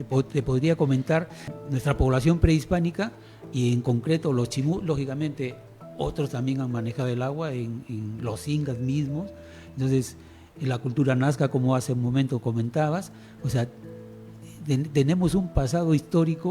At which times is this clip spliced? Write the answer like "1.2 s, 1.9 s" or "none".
1.5 s